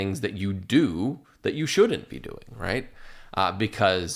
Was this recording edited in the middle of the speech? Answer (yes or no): no